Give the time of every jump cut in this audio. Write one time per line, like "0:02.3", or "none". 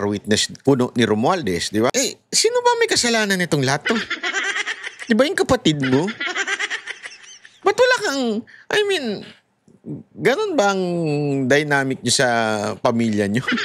0:01.9